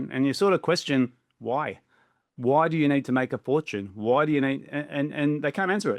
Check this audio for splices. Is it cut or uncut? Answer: uncut